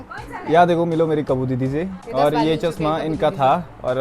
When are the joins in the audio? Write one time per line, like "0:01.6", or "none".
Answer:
0:02.0

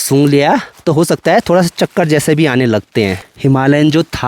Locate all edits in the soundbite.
0:03.3

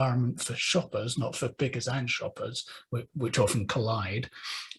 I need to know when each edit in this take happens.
none

